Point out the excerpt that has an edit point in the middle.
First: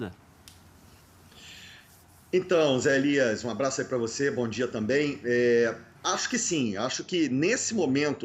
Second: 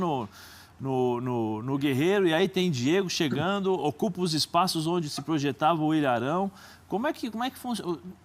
second; 1 cut; at 2.5 s

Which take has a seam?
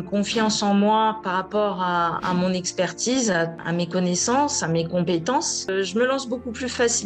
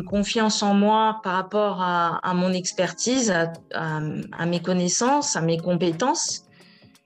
first; 2 cuts; at 3.6 s, 5.7 s

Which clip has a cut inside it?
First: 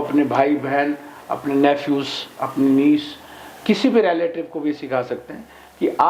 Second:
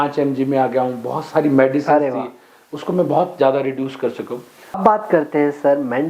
second; 1 cut; at 4.8 s

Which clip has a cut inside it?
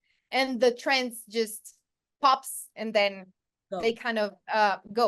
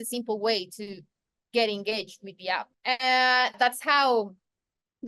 second; 2 cuts; at 2.7 s, 3.5 s

